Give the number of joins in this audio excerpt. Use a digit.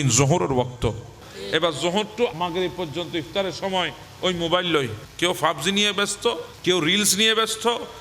4